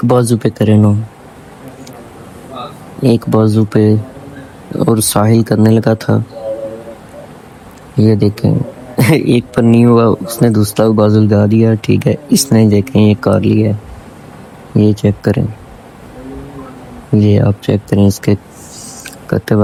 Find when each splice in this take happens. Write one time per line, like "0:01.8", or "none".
none